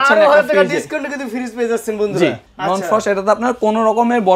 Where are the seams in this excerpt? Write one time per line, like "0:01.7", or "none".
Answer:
0:02.5